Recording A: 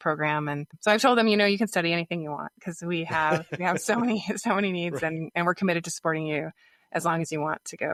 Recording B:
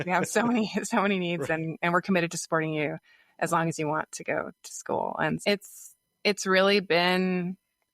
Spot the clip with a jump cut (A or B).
B